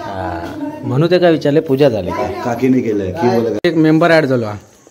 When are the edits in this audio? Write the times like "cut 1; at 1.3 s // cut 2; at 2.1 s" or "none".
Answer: cut 1; at 3.6 s